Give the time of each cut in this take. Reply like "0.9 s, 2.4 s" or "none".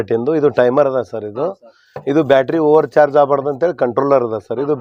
none

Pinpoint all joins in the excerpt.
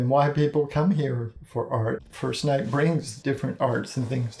2.1 s, 3.1 s

